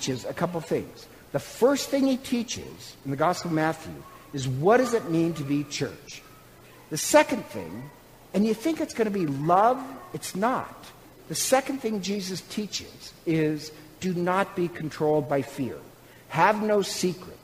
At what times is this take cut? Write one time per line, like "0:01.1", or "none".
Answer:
0:06.5